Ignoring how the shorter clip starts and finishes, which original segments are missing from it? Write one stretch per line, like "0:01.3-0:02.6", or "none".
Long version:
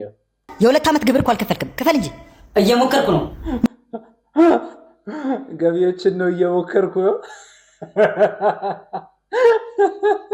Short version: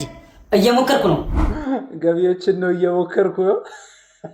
0:03.4-0:04.9